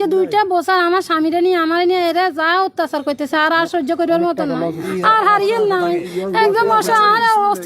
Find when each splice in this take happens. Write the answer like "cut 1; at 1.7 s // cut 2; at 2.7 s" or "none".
cut 1; at 4.8 s // cut 2; at 6.1 s